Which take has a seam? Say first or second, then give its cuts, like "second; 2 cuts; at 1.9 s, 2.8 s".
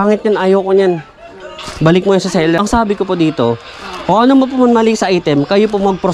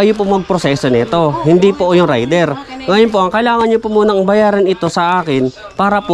first; 1 cut; at 2.6 s